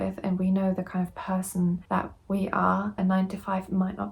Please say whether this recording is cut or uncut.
cut